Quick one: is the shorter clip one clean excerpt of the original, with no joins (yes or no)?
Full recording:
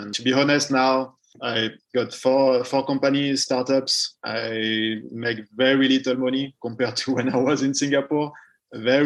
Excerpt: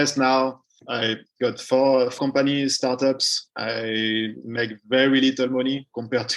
no